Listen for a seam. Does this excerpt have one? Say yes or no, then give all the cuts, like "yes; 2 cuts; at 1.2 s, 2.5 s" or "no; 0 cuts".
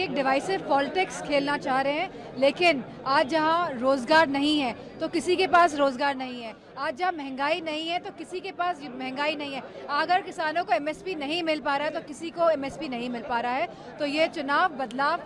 no; 0 cuts